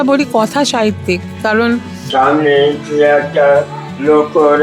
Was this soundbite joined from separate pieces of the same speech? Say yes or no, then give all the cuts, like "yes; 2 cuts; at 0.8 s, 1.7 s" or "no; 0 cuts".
yes; 1 cut; at 2.0 s